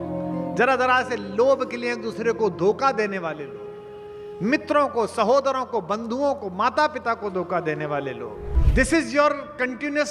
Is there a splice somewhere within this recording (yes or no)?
yes